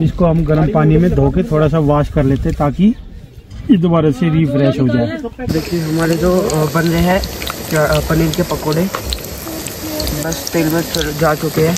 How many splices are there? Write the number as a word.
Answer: one